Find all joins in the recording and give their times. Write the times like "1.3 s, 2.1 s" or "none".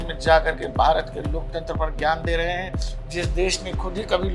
none